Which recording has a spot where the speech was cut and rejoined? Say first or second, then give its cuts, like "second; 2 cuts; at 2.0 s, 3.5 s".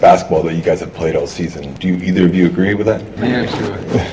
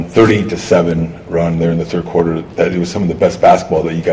first; 2 cuts; at 1.7 s, 3.1 s